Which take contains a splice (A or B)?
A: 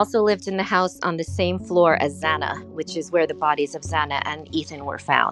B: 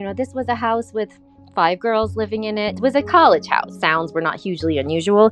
B